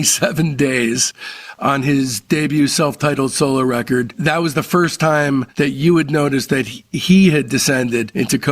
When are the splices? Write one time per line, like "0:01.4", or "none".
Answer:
0:04.2
0:05.5